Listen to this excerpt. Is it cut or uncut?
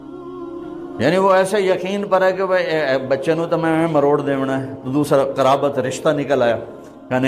cut